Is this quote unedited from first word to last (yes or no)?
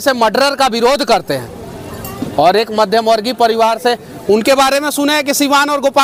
yes